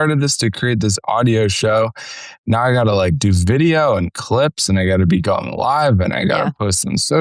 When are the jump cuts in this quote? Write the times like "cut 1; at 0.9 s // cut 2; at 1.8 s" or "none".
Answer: cut 1; at 2.4 s